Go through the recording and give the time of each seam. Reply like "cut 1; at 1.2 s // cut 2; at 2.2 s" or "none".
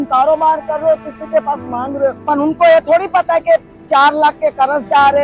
cut 1; at 2.2 s